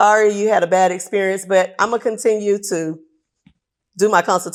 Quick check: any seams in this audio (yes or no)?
no